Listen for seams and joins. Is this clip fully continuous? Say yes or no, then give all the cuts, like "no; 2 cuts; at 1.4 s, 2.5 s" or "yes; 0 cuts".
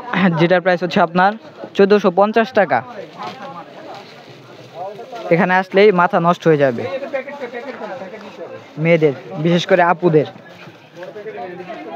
yes; 0 cuts